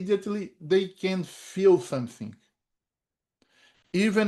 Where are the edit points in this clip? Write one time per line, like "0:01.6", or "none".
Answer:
none